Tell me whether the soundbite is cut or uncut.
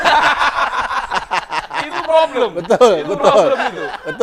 uncut